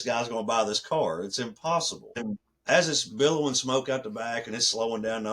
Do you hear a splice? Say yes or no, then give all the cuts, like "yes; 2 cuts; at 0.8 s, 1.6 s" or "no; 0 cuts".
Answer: yes; 1 cut; at 2.2 s